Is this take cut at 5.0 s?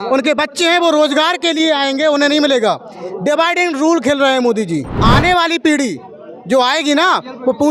yes; 1 cut; at 5.0 s

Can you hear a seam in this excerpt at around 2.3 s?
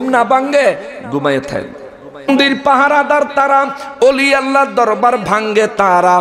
yes; 1 cut; at 2.3 s

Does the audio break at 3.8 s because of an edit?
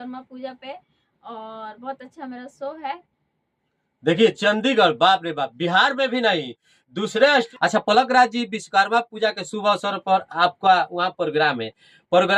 no; 1 cut; at 7.5 s

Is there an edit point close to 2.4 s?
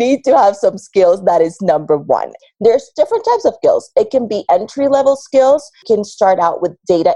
yes; 2 cuts; at 2.4 s, 5.8 s

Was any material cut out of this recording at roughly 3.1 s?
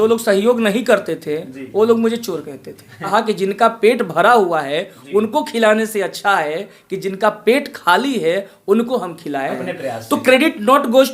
yes; 2 cuts; at 3.1 s, 9.6 s

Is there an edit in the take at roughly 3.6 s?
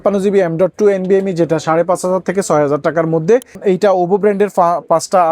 yes; 1 cut; at 3.6 s

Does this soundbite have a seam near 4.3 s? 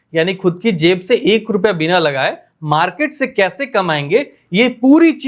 no; 0 cuts

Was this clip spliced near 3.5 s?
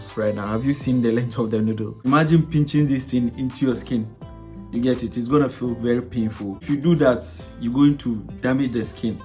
no; 2 cuts; at 1.9 s, 6.6 s

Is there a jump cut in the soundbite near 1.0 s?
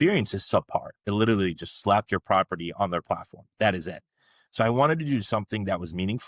yes; 1 cut; at 1.0 s

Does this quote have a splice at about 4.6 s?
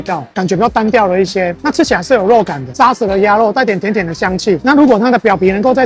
yes; 2 cuts; at 2.6 s, 4.6 s

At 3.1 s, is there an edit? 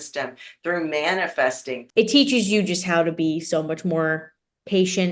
no; 1 cut; at 1.8 s

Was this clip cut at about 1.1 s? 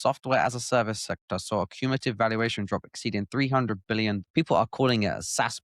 no; 1 cut; at 4.2 s

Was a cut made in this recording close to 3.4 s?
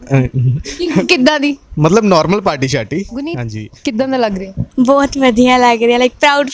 yes; 1 cut; at 3.4 s

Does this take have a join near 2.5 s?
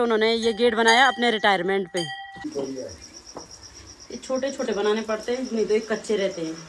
yes; 1 cut; at 2.5 s

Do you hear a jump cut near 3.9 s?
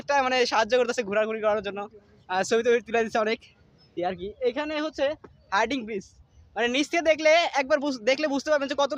yes; 1 cut; at 3.9 s

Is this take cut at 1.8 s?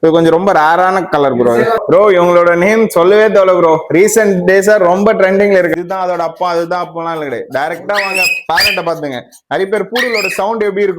yes; 2 cuts; at 1.8 s, 5.7 s

